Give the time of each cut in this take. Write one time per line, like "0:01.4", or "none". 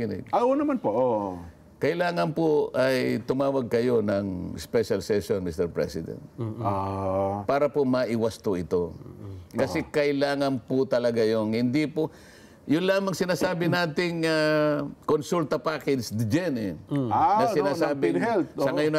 none